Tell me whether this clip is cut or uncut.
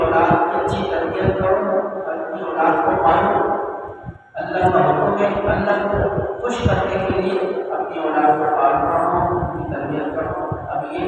uncut